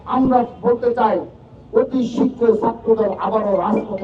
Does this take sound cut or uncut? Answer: uncut